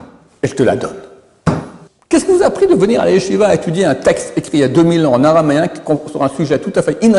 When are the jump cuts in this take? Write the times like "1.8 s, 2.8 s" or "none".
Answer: 1.8 s